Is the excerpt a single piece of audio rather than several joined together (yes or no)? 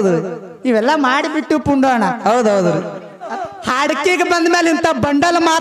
no